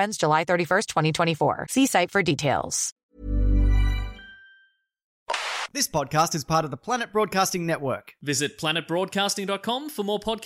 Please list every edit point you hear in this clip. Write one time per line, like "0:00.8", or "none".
0:03.0
0:05.6